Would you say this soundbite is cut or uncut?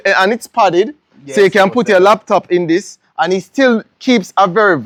uncut